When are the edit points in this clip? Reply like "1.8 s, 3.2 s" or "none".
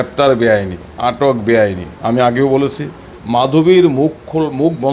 3.2 s